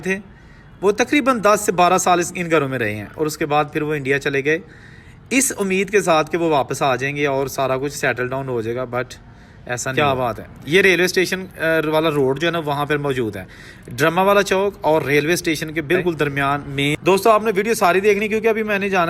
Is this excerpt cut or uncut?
cut